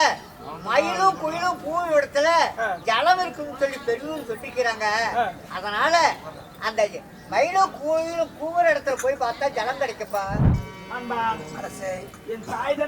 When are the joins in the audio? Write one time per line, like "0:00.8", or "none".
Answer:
0:10.5